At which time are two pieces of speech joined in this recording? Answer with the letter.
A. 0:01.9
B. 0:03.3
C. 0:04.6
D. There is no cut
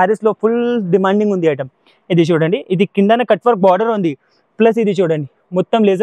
D